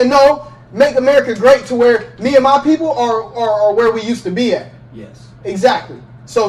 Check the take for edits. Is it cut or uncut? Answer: uncut